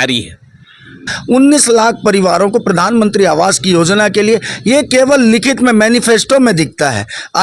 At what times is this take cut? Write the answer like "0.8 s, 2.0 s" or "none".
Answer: 1.1 s